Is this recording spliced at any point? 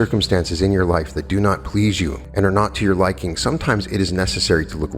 yes; 1 cut; at 2.2 s

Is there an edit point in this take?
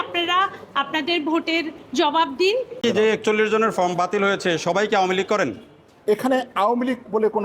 yes; 1 cut; at 2.8 s

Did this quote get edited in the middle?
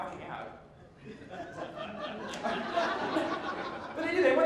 yes; 1 cut; at 2.2 s

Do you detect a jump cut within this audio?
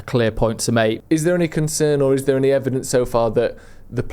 yes; 1 cut; at 1.0 s

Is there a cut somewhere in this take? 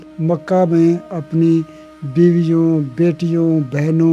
no; 0 cuts

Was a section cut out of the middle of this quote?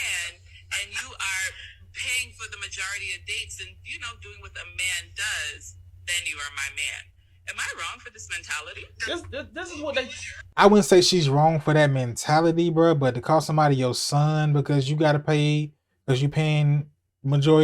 no; 0 cuts

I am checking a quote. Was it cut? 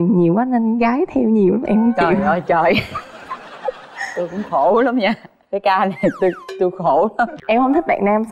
yes; 1 cut; at 7.4 s

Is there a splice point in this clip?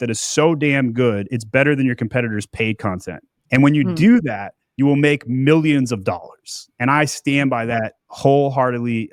no; 0 cuts

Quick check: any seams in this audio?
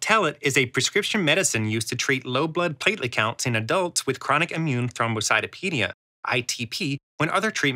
no; 0 cuts

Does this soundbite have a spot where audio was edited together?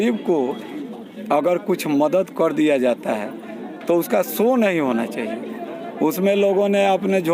no; 0 cuts

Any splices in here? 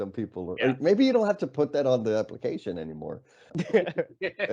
yes; 1 cut; at 3.5 s

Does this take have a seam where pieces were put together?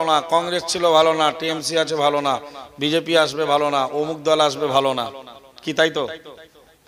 no; 0 cuts

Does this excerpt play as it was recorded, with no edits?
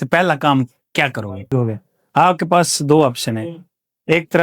no; 1 cut; at 1.5 s

